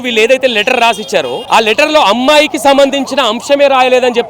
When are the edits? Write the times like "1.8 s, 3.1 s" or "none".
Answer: 1.4 s

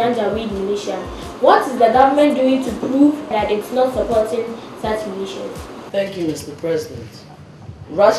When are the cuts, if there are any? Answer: 5.7 s

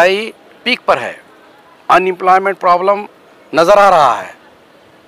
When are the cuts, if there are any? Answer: none

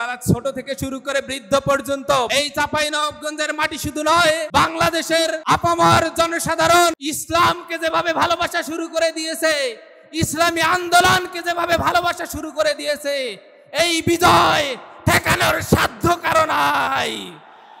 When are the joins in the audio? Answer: 2.3 s, 4.5 s, 5.4 s, 7.1 s

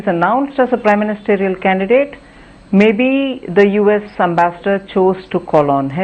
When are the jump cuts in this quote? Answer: none

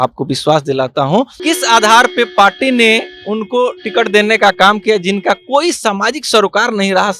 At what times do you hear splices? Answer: 1.3 s

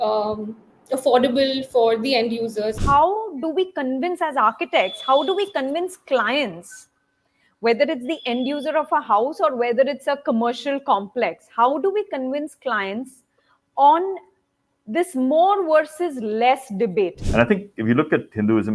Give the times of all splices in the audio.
2.8 s, 17.2 s

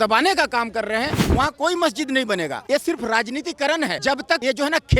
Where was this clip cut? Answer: 1.2 s, 2.6 s, 4.2 s

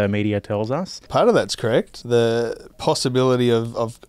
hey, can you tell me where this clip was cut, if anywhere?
1.0 s, 1.9 s, 2.7 s

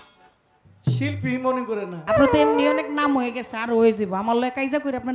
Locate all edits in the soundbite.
2.0 s

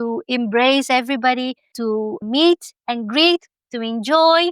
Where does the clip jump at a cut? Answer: 2.0 s

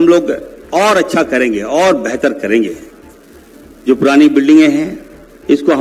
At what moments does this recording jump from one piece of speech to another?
none

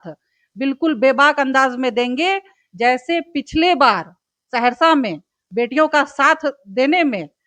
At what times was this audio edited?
none

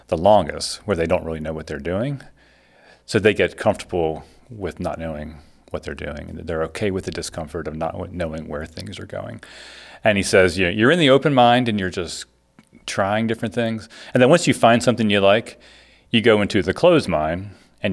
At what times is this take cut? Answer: none

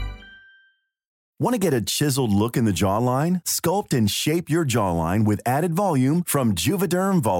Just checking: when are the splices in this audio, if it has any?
1.3 s

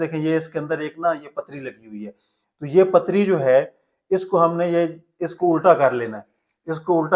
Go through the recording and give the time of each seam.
none

